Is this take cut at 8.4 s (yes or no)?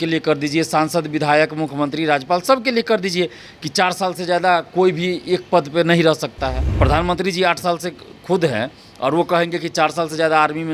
no